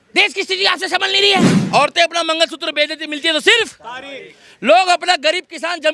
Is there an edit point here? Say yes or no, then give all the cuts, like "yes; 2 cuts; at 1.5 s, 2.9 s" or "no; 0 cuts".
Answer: yes; 1 cut; at 1.6 s